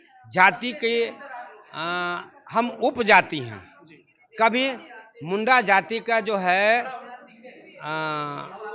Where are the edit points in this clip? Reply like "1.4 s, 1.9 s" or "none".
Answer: none